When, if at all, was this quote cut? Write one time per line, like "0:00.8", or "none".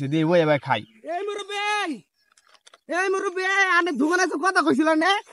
none